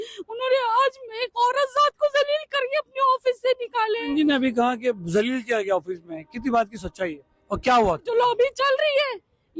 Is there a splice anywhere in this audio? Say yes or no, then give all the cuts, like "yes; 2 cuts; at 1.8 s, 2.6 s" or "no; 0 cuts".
yes; 2 cuts; at 4.0 s, 8.1 s